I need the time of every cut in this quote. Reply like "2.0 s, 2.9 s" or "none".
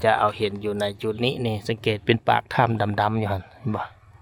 none